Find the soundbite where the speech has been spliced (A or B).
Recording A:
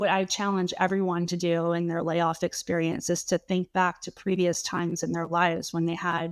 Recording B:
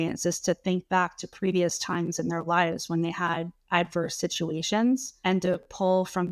B